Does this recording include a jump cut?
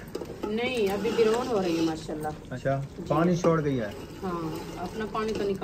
yes; 1 cut; at 2.5 s

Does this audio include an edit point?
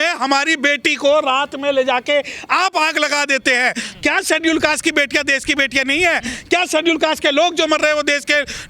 yes; 1 cut; at 3.8 s

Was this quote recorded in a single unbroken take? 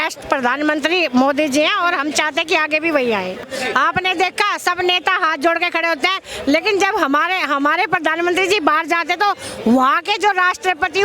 no; 1 cut; at 3.4 s

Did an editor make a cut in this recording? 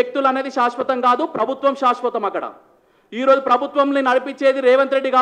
no; 0 cuts

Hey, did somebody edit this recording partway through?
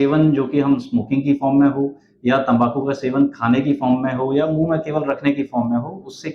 no; 0 cuts

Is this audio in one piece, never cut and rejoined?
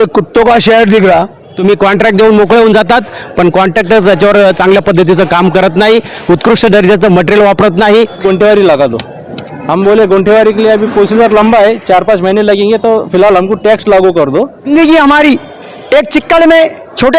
no; 3 cuts; at 1.4 s, 8.2 s, 14.7 s

